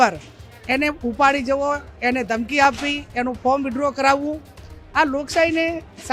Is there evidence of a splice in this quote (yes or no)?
no